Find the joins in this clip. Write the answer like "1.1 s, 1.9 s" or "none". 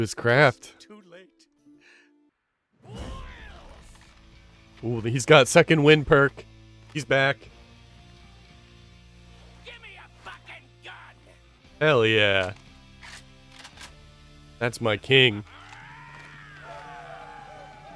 2.3 s

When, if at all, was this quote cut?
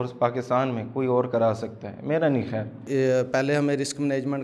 2.8 s

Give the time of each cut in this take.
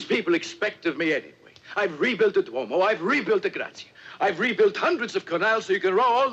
none

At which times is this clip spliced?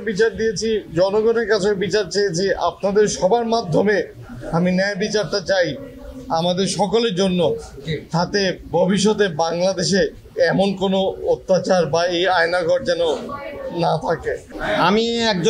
none

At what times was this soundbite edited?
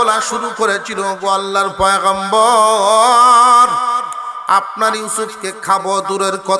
none

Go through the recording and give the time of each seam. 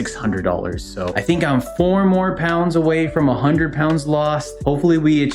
1.0 s

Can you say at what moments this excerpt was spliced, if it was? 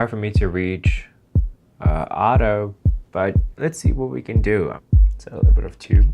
4.8 s

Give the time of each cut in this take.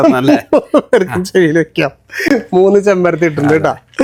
none

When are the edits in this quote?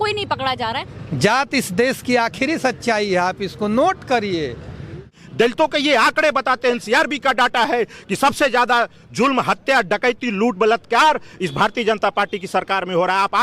0.9 s, 5.2 s

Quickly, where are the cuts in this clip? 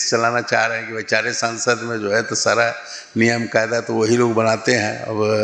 none

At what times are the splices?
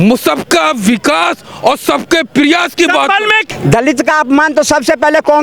3.4 s

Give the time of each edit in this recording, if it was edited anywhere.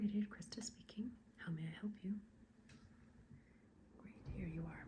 3.7 s

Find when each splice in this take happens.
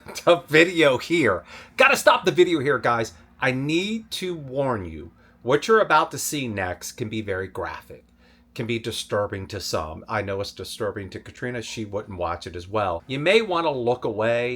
13.1 s

